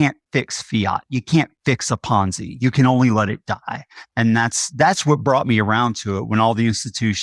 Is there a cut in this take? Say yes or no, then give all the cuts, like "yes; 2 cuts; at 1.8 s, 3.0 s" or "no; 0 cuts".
no; 0 cuts